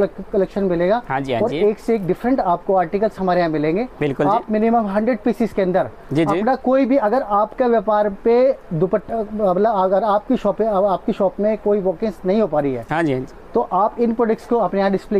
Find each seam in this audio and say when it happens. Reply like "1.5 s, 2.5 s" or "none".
none